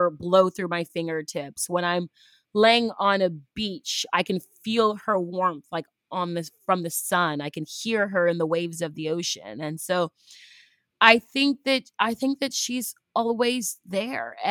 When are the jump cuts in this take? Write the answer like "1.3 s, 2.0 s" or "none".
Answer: none